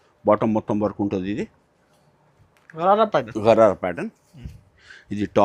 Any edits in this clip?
no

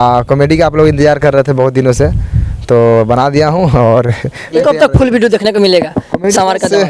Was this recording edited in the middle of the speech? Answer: yes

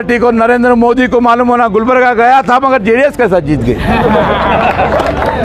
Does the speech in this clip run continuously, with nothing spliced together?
yes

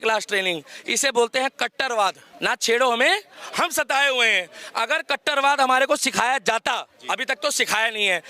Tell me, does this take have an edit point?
yes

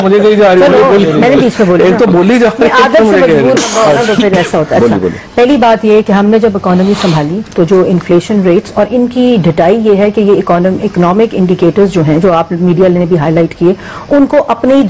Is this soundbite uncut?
yes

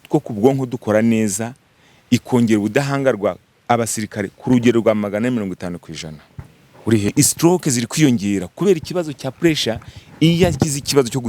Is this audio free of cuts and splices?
no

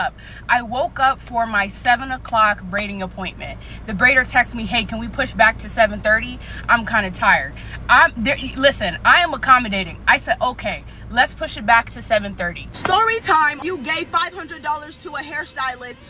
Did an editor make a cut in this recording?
yes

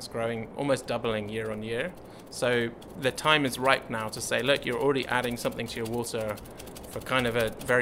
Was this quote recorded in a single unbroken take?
yes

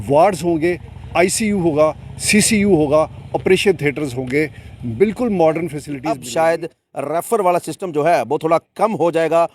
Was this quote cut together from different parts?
yes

